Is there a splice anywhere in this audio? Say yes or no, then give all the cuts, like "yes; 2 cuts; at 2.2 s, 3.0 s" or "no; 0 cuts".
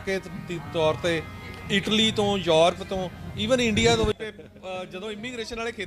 yes; 1 cut; at 4.2 s